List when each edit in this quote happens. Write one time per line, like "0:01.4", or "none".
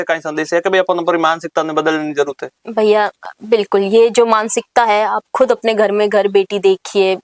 none